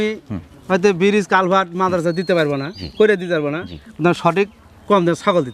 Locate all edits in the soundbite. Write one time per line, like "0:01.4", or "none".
none